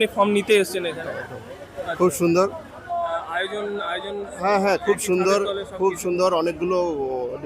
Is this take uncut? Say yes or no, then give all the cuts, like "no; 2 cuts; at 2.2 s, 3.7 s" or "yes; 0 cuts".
yes; 0 cuts